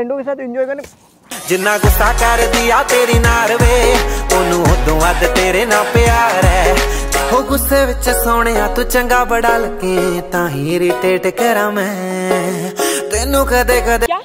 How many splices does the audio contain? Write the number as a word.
zero